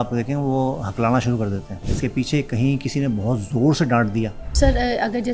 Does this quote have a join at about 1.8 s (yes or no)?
yes